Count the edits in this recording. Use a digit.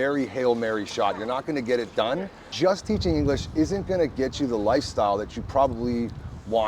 1